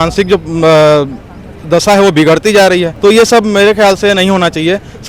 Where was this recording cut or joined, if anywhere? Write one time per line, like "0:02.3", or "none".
0:02.9